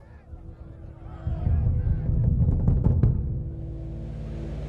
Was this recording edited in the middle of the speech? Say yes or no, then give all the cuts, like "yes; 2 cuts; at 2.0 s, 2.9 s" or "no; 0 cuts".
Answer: yes; 1 cut; at 3.3 s